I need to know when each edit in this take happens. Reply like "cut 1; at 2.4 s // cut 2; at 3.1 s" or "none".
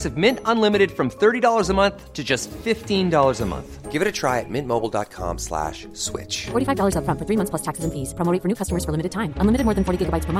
none